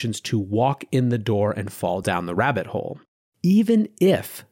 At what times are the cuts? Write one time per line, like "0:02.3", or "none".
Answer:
0:03.2